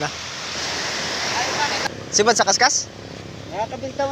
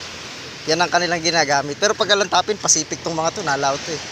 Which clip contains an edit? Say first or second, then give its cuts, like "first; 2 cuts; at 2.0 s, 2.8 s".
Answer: first; 1 cut; at 1.8 s